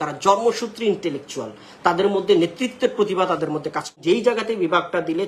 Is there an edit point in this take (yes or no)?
yes